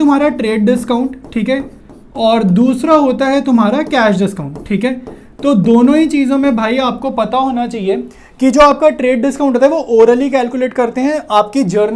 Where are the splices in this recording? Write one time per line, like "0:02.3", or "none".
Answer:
none

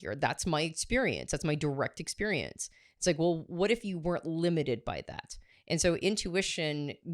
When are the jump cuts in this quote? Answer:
none

